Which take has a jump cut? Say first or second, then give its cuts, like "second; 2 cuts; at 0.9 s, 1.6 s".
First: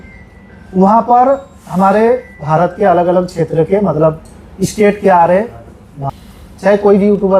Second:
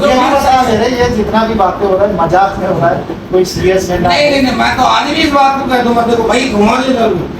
first; 1 cut; at 6.2 s